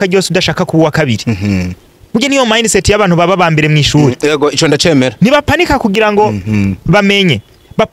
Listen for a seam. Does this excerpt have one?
no; 0 cuts

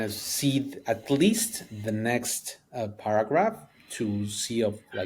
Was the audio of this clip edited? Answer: no; 0 cuts

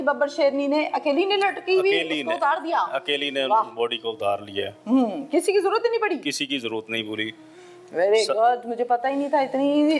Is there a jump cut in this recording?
no; 0 cuts

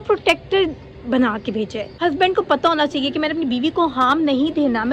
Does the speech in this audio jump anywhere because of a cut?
yes; 1 cut; at 1.9 s

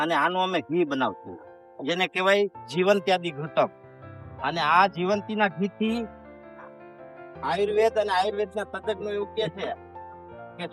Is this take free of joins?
yes; 0 cuts

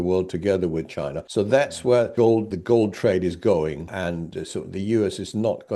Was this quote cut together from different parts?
yes; 3 cuts; at 1.2 s, 2.3 s, 4.0 s

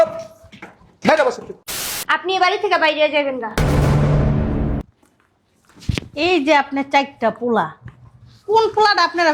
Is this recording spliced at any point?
yes; 1 cut; at 2.0 s

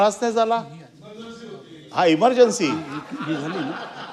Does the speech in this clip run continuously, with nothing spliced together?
yes; 0 cuts

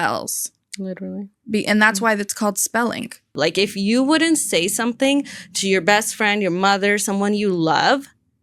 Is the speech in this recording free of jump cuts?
no; 1 cut; at 3.3 s

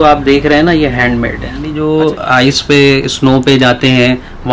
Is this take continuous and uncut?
no; 1 cut; at 1.7 s

